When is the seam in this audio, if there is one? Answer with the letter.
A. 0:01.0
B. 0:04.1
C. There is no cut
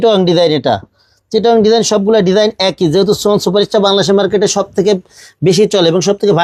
C